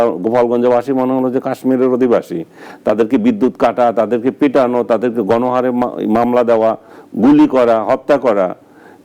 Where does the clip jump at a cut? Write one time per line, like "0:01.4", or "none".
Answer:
none